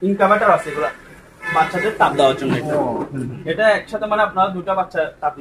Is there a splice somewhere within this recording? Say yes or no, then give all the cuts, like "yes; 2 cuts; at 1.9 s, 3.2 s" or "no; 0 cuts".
no; 0 cuts